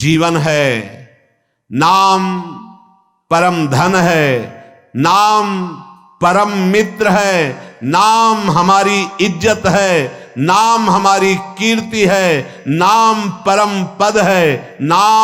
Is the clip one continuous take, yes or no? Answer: yes